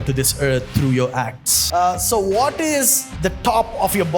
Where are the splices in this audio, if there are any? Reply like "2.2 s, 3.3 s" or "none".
1.6 s, 3.0 s